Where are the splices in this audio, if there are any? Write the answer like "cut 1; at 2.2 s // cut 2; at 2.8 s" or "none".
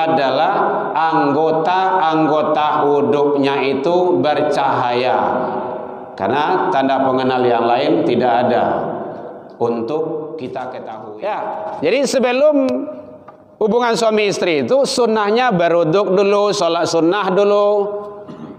cut 1; at 10.7 s

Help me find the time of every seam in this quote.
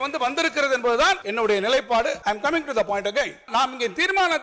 cut 1; at 1.2 s // cut 2; at 2.2 s // cut 3; at 3.5 s

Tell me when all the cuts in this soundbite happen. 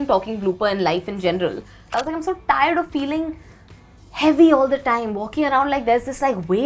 cut 1; at 1.8 s

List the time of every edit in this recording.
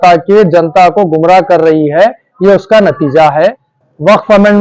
cut 1; at 3.7 s

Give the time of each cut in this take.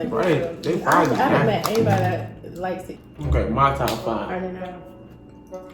cut 1; at 2.9 s

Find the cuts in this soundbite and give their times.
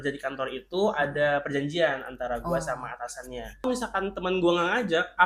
cut 1; at 3.7 s

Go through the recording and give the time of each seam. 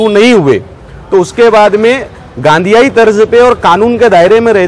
none

